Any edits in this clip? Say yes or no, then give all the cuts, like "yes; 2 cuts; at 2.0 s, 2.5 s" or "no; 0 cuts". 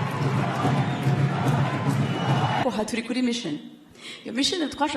yes; 1 cut; at 2.6 s